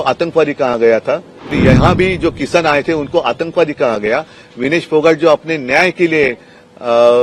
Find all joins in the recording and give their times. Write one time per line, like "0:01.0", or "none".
0:01.6